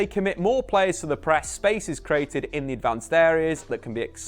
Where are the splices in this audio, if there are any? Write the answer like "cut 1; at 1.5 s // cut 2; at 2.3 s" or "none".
cut 1; at 1.5 s